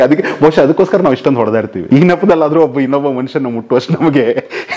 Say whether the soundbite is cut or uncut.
cut